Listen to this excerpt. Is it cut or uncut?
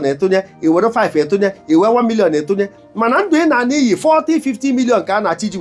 uncut